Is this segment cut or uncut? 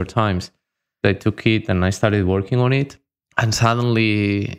cut